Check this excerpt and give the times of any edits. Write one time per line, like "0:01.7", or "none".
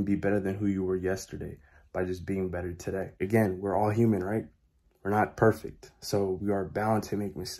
0:03.2